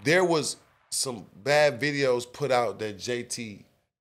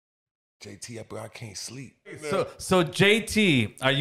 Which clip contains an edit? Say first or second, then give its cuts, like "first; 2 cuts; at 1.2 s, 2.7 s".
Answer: second; 1 cut; at 2.3 s